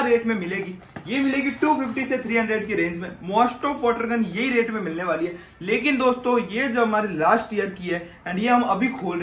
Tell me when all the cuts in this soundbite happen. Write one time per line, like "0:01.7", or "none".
none

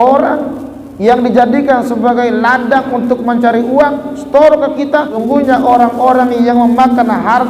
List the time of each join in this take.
0:05.2

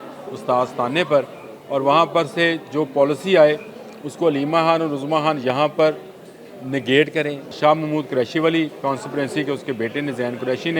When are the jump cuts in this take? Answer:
0:07.5

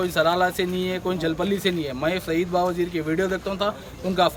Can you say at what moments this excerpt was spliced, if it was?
none

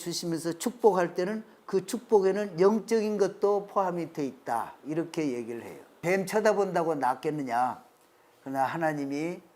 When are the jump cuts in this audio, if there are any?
0:06.0

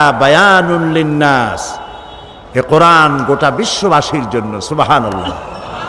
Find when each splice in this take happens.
none

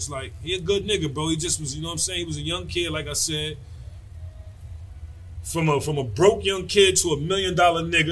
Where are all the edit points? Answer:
none

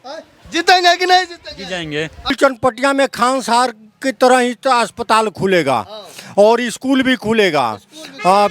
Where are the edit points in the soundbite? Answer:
0:02.4

